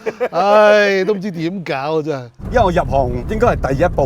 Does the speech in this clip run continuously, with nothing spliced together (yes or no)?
no